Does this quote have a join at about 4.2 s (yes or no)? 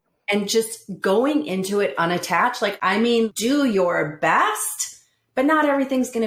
no